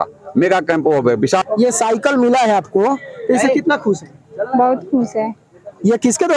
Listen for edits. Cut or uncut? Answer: cut